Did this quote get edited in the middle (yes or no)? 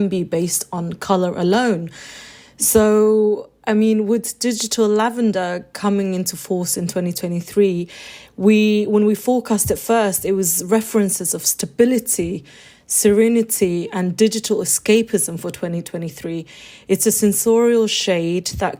no